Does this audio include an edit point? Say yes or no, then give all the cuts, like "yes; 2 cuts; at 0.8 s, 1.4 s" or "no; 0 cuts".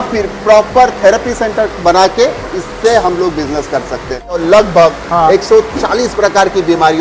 no; 0 cuts